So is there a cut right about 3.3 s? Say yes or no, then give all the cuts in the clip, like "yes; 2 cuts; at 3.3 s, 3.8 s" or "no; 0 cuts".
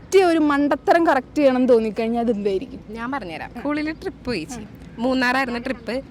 yes; 1 cut; at 3.3 s